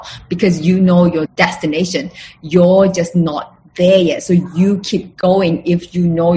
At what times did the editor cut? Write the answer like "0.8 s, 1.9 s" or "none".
none